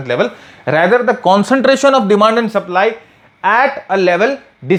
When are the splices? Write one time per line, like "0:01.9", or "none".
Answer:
none